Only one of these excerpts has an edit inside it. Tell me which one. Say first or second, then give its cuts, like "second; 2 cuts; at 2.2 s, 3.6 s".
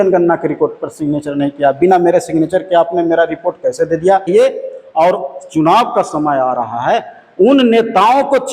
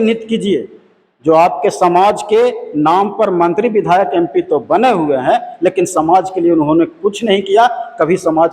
first; 1 cut; at 4.3 s